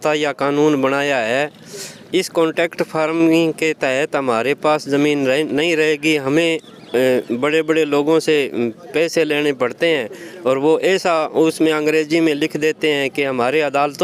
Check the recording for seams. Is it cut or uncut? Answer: uncut